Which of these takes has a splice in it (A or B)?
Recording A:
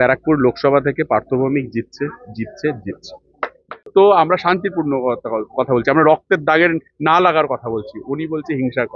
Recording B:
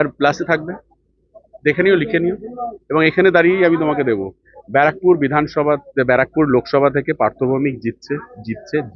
A